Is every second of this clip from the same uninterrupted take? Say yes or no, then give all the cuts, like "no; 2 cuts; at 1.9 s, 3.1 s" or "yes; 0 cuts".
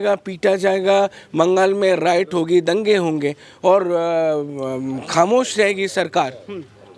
yes; 0 cuts